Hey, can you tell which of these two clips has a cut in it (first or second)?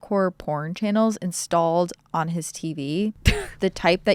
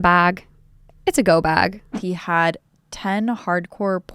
second